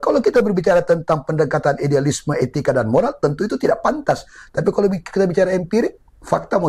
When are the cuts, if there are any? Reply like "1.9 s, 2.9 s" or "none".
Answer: none